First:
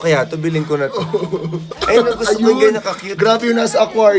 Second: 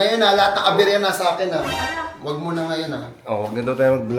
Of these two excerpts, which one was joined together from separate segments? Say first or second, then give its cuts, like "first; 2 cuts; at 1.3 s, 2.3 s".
first; 1 cut; at 1.7 s